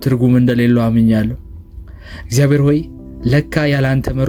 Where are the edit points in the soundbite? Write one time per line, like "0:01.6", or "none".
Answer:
none